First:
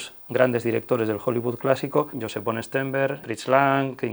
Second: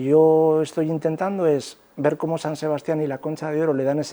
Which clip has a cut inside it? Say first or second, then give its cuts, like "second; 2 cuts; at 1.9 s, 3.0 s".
first; 2 cuts; at 2.2 s, 3.2 s